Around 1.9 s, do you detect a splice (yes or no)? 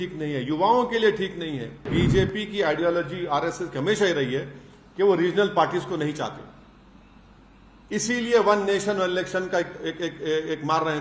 yes